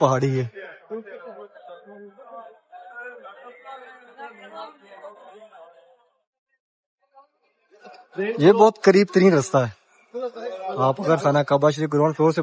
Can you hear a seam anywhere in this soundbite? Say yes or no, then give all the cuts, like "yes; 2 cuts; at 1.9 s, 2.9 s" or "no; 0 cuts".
no; 0 cuts